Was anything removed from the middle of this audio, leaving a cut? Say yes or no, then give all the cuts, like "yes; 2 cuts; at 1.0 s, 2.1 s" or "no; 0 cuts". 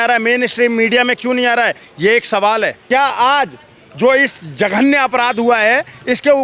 yes; 1 cut; at 2.8 s